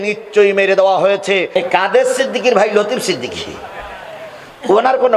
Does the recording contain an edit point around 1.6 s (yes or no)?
yes